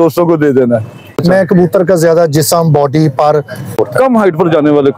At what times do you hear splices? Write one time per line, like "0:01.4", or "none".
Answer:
0:01.1
0:03.7

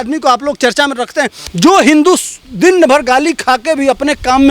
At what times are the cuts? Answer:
0:01.4

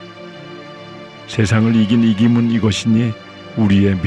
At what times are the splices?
0:01.3

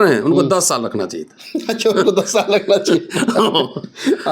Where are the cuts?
none

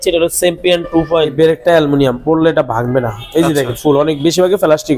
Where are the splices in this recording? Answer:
0:01.3

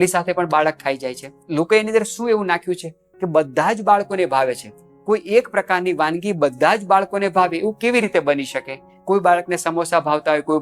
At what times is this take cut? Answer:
none

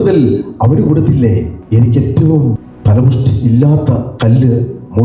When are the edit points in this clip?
0:01.6
0:02.7
0:03.8

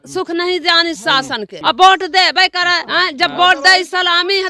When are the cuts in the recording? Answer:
0:01.5
0:02.8

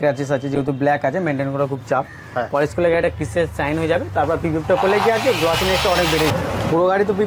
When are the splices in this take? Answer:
0:06.3

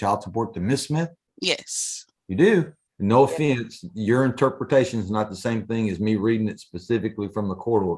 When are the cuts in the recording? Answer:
0:01.2
0:02.8

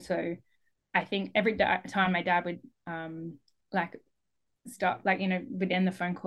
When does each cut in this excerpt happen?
none

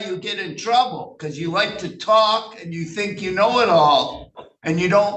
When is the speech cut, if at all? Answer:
none

